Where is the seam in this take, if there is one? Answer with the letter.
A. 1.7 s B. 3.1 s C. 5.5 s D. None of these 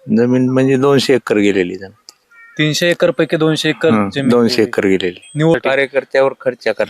C